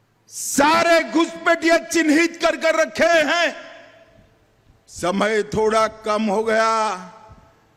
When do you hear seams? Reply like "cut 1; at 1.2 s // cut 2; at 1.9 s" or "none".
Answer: none